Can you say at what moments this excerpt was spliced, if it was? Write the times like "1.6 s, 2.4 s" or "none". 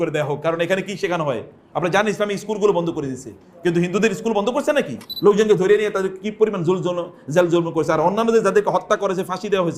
5.0 s